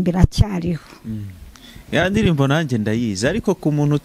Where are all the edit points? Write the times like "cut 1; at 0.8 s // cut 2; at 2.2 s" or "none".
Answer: none